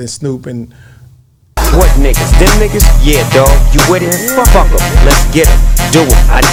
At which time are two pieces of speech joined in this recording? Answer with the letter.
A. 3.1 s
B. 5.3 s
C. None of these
C